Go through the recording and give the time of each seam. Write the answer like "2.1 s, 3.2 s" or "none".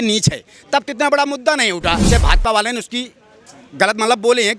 2.1 s